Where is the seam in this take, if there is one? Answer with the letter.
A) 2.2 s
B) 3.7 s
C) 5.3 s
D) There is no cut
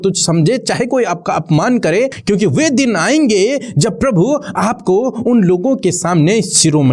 A